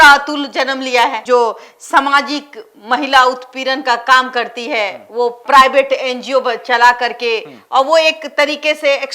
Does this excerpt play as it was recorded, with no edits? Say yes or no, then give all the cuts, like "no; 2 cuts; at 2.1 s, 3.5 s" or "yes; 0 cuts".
yes; 0 cuts